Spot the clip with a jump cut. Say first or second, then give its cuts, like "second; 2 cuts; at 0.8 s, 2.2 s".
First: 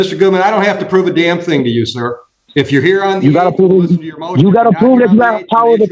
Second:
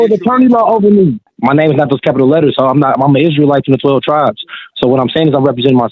second; 1 cut; at 1.3 s